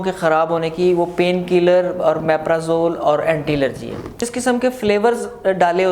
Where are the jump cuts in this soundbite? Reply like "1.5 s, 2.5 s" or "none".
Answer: 4.3 s